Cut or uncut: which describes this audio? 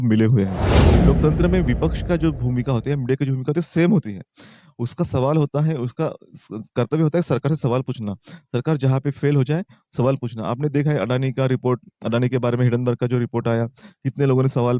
cut